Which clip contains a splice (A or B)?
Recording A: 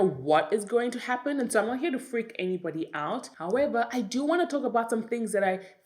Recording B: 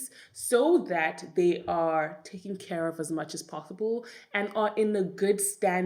A